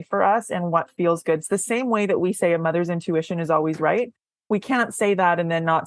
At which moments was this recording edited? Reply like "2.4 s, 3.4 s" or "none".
none